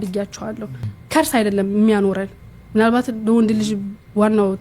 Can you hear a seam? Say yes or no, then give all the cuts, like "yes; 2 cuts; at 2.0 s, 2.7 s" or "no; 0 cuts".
yes; 1 cut; at 0.9 s